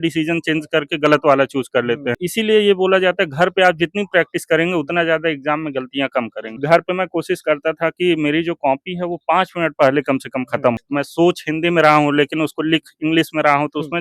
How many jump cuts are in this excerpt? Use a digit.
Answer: 3